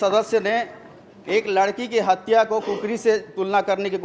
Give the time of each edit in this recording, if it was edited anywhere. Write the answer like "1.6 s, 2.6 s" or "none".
none